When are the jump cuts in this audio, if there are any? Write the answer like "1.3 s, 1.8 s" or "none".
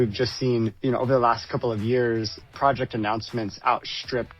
2.4 s